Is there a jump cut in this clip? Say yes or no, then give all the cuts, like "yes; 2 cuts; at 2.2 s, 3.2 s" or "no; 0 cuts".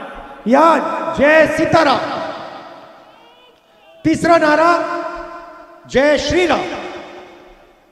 no; 0 cuts